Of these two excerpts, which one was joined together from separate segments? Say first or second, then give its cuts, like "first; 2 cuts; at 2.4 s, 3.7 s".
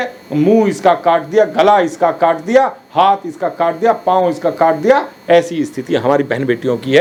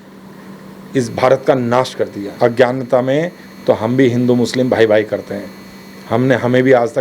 second; 1 cut; at 2.2 s